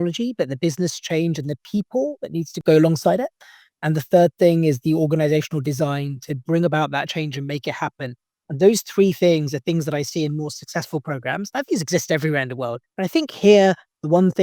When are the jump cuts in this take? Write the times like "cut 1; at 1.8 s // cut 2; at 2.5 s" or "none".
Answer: cut 1; at 2.5 s // cut 2; at 12.8 s